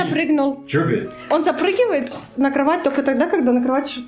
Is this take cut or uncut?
cut